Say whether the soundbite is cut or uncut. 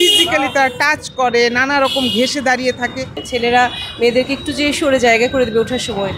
cut